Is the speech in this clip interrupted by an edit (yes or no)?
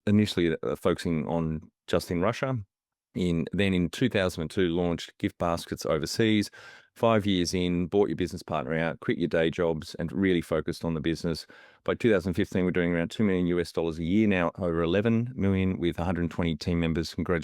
no